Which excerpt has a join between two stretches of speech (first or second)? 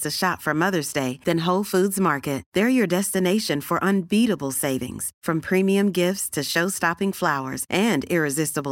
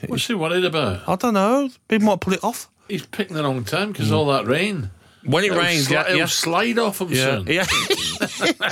second